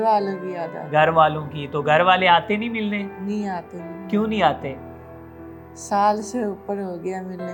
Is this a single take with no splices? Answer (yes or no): yes